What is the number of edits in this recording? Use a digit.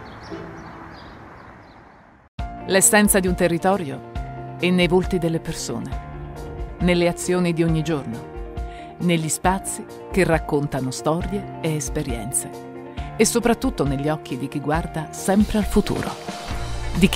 1